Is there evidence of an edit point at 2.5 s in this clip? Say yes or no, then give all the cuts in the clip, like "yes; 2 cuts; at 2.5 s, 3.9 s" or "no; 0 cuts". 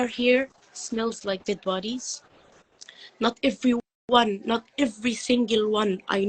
no; 0 cuts